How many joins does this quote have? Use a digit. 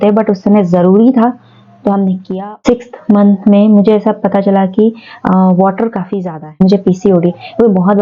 2